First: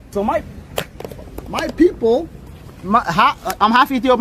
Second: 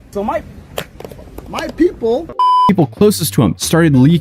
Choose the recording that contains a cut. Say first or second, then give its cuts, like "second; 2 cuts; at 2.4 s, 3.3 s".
second; 1 cut; at 2.7 s